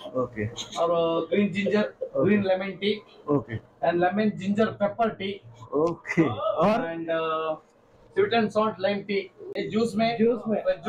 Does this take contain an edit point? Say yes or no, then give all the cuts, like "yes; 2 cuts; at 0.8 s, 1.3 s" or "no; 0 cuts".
yes; 1 cut; at 9.5 s